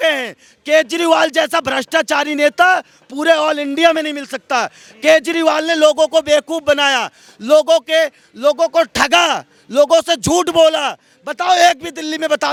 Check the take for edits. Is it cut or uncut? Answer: uncut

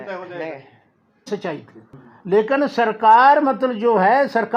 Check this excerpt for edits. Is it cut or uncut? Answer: cut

